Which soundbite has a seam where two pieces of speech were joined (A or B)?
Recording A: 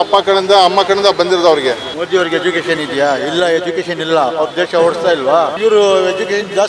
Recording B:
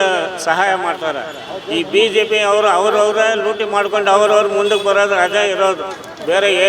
A